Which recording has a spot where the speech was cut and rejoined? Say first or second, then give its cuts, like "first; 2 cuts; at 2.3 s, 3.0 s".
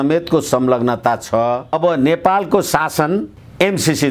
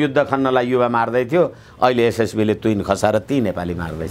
first; 1 cut; at 1.7 s